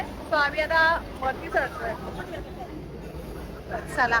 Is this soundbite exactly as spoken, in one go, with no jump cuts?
yes; 0 cuts

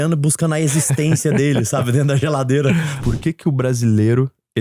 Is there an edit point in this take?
yes; 1 cut; at 2.9 s

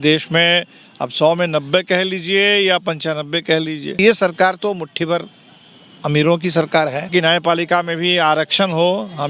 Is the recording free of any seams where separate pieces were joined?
no; 2 cuts; at 4.0 s, 7.1 s

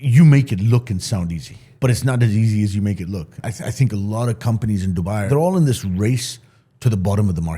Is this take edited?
yes; 3 cuts; at 1.6 s, 3.3 s, 5.2 s

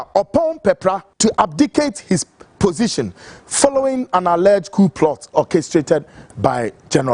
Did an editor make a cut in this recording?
yes; 2 cuts; at 1.1 s, 5.3 s

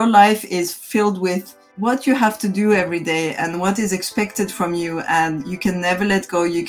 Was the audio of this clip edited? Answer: yes; 1 cut; at 1.6 s

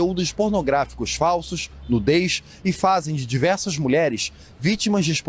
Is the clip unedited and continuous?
yes; 0 cuts

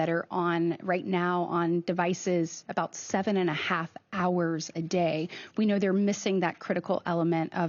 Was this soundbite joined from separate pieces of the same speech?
no; 0 cuts

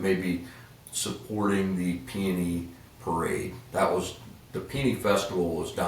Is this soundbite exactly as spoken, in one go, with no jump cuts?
yes; 0 cuts

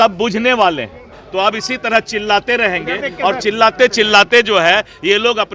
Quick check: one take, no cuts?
no; 1 cut; at 1.1 s

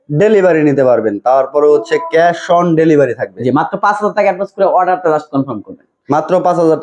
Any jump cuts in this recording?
no; 0 cuts

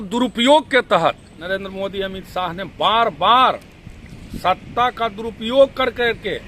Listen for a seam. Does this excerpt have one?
yes; 1 cut; at 1.3 s

